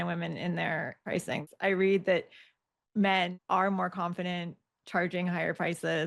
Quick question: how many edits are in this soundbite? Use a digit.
2